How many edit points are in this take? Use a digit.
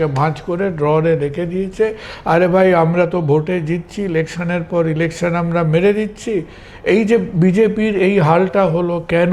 0